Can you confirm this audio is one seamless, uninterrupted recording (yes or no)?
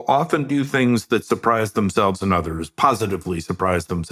yes